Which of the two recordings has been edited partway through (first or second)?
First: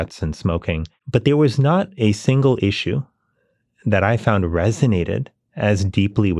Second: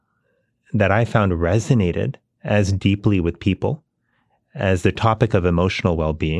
first